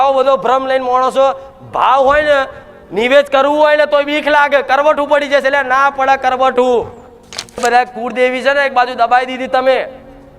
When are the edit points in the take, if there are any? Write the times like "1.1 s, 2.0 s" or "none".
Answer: 7.6 s